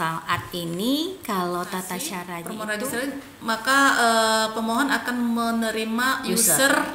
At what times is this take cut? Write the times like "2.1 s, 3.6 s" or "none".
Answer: 2.4 s